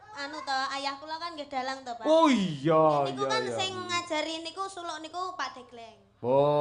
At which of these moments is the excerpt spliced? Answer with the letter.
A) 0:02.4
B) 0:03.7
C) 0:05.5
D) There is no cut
D